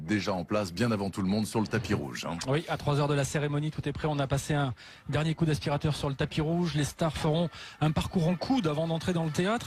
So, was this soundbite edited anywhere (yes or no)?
no